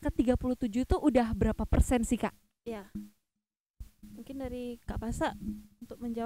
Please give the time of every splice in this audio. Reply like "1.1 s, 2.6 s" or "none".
none